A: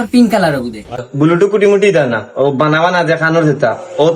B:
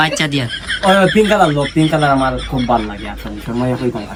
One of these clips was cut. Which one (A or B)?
A